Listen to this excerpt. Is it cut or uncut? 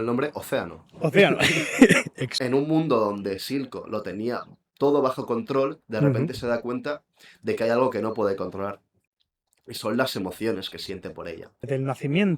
cut